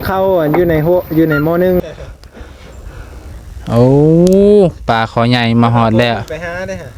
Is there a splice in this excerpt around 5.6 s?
no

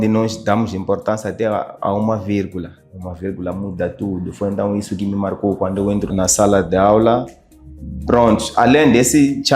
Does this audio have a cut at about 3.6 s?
no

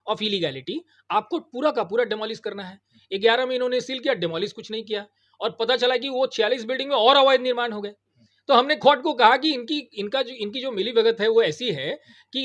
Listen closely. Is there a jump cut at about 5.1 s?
no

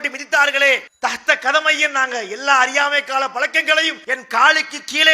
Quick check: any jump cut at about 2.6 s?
no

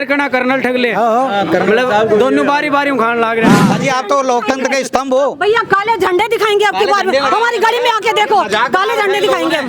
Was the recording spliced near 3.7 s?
yes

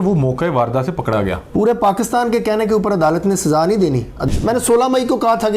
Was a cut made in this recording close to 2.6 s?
no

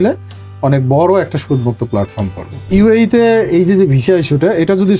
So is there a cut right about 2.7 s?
yes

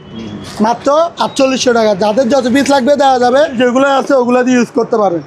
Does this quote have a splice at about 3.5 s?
yes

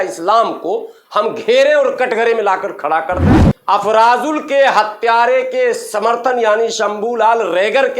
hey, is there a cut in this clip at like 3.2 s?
yes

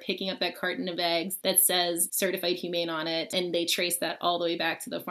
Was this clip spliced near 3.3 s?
yes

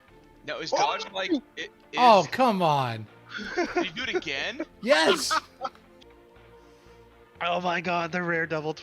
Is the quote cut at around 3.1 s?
no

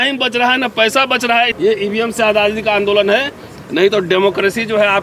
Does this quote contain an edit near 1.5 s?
yes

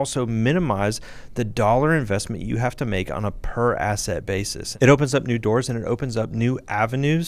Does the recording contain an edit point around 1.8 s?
no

